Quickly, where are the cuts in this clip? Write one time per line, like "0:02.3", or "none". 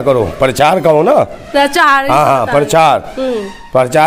none